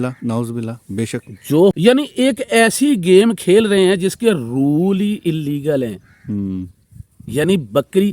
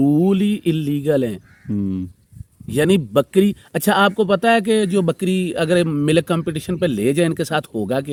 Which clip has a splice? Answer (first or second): first